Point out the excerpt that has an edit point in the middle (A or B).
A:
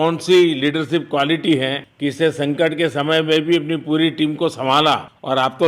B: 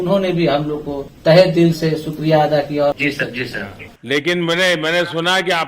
B